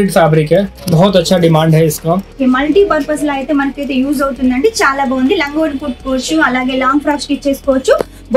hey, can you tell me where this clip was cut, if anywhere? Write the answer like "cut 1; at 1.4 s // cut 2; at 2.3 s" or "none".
cut 1; at 2.3 s